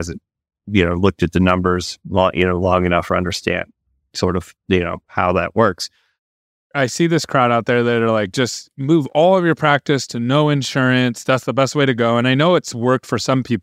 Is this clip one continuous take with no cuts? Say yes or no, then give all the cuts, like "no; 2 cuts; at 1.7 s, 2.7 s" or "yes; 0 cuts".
no; 1 cut; at 6.4 s